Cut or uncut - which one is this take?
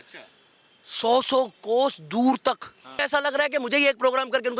cut